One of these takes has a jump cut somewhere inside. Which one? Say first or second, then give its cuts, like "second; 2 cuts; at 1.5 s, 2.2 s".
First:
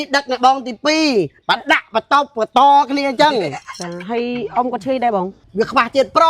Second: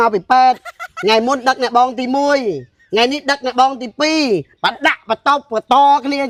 first; 1 cut; at 5.4 s